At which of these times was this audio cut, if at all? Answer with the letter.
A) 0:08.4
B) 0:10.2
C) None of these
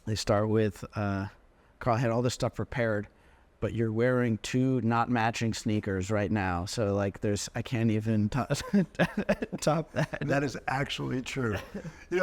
B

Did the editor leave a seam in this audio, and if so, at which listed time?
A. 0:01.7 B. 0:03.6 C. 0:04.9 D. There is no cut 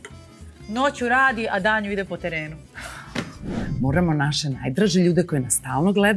B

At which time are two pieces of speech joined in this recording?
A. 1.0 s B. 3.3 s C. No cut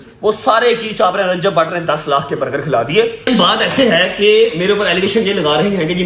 B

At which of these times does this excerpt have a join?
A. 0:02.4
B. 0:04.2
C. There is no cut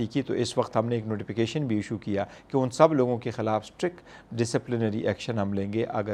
C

